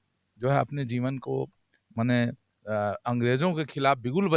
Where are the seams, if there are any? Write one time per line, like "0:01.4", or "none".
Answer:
none